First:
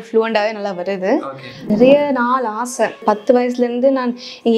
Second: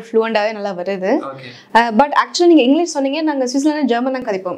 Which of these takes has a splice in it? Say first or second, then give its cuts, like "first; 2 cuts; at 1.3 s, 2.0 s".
first; 2 cuts; at 1.7 s, 3.0 s